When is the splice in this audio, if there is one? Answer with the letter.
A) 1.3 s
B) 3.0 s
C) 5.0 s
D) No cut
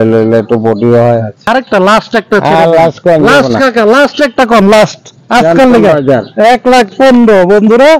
A